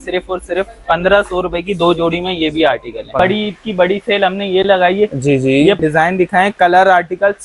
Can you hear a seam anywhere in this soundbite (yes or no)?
yes